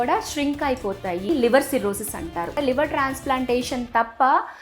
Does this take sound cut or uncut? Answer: cut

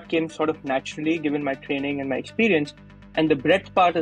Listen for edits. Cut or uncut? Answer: uncut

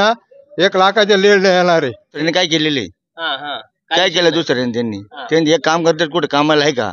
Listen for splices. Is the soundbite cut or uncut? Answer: cut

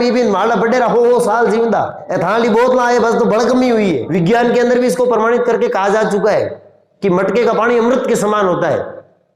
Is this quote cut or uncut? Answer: cut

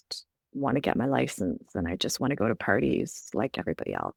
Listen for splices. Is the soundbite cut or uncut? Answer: uncut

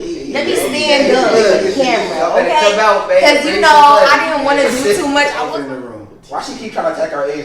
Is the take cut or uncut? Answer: cut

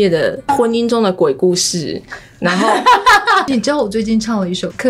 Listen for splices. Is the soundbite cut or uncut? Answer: cut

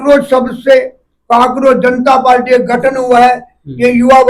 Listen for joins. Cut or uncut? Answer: uncut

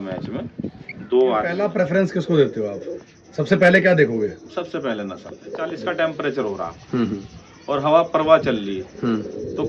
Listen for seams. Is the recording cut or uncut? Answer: cut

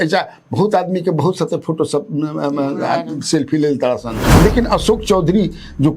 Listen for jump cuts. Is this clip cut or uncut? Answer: cut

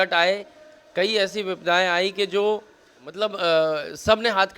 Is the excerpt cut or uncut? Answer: cut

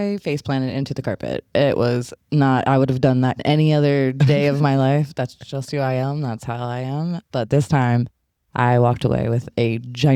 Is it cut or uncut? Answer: uncut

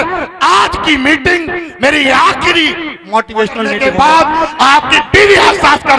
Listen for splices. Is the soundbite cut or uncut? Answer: cut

